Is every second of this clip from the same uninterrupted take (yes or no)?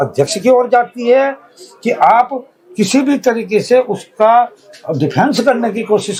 yes